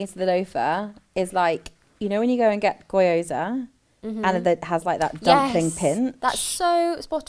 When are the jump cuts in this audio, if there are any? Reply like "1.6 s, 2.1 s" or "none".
none